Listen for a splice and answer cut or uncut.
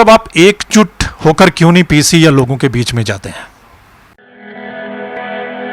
cut